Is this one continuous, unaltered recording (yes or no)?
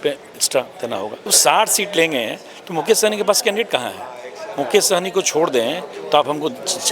no